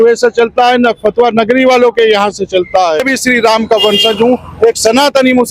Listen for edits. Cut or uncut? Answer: cut